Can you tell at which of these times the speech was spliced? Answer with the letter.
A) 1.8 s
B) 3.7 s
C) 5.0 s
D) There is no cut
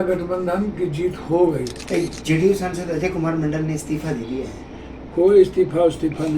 A